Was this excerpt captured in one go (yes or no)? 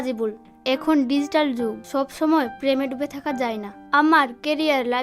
yes